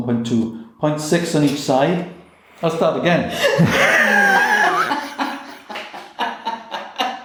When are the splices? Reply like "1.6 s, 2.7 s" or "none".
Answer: none